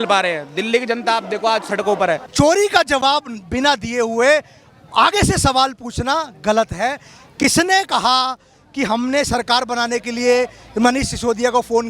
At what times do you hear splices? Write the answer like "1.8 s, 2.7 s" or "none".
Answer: 2.3 s